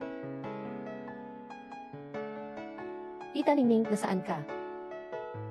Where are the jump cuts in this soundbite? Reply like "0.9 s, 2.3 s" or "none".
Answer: 1.7 s, 3.3 s, 4.4 s